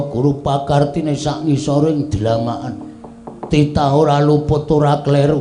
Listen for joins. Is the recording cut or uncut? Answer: uncut